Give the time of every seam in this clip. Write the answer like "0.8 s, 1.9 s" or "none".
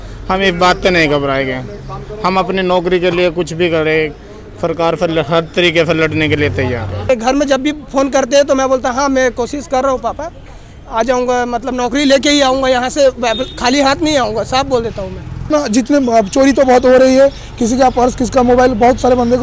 7.1 s, 15.5 s